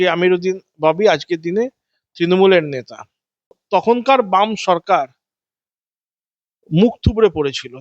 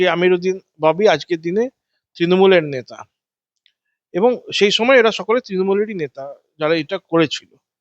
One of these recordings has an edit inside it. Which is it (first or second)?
first